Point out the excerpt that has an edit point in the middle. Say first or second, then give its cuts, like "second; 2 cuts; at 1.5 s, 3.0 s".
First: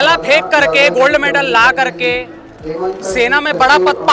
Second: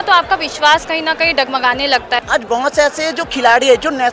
second; 1 cut; at 2.2 s